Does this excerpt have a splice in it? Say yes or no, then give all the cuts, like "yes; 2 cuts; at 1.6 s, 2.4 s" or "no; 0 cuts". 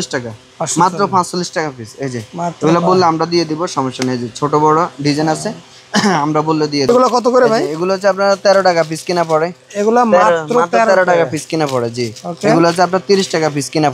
yes; 1 cut; at 6.9 s